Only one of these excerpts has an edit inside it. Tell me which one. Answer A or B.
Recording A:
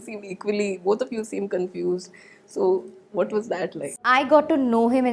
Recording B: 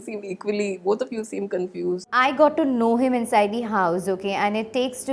B